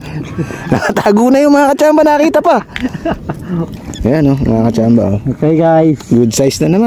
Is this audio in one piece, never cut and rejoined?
no; 1 cut; at 3.8 s

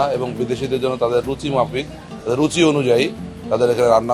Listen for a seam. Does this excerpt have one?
no; 0 cuts

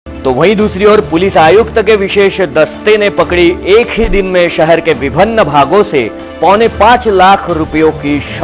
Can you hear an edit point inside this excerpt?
no; 0 cuts

